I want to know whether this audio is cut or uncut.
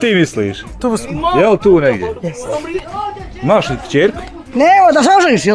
cut